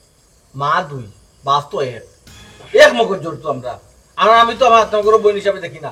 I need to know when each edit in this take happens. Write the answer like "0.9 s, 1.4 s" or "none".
none